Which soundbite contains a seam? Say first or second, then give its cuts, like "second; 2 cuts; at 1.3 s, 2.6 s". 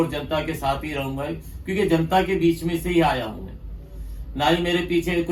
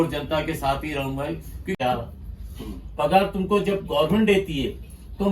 second; 1 cut; at 1.7 s